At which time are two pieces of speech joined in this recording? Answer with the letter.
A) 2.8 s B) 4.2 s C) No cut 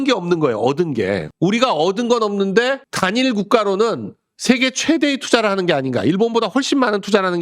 A